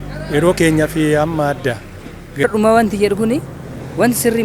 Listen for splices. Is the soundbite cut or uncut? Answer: cut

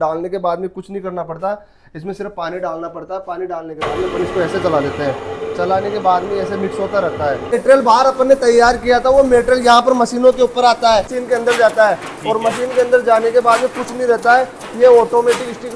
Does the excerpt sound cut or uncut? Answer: cut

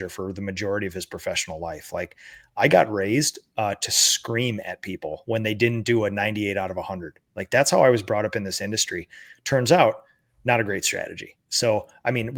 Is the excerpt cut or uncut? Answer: uncut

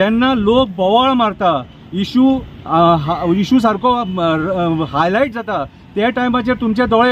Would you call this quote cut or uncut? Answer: uncut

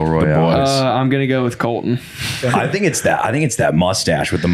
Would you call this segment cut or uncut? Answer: cut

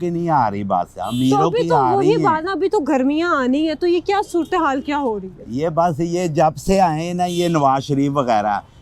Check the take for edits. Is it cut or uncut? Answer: uncut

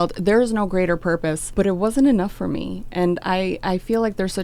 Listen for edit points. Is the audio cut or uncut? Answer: cut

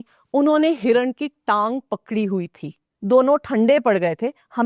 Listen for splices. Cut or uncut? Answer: uncut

